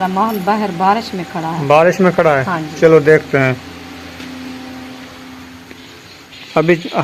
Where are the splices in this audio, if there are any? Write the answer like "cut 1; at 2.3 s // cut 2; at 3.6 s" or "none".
none